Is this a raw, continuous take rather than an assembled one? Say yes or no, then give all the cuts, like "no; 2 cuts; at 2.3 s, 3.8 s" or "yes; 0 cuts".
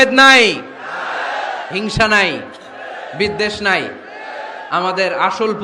yes; 0 cuts